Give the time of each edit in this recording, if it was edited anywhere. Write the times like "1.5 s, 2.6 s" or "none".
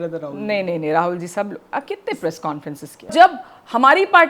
3.1 s